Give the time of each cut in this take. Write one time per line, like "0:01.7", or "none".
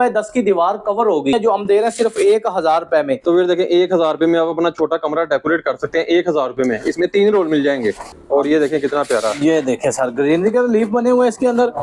0:01.3
0:08.0

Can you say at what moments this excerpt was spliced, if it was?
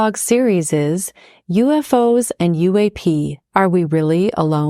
none

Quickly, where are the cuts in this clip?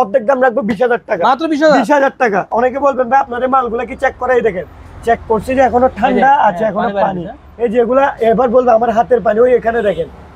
0:02.5

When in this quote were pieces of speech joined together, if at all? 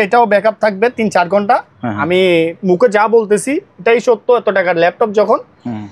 none

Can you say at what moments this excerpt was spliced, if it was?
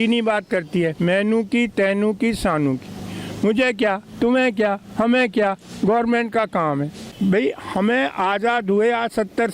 0:07.0

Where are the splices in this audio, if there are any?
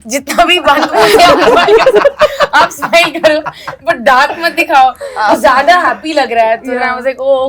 none

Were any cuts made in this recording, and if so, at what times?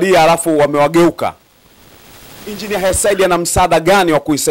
0:02.6

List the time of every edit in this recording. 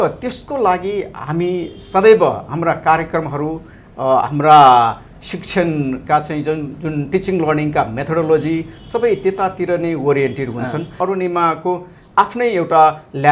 0:11.0

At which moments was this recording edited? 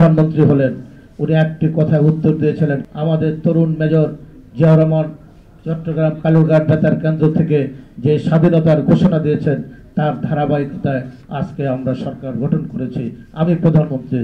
0:02.9

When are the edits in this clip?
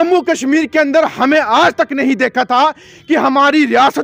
none

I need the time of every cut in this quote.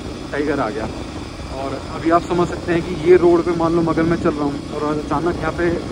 none

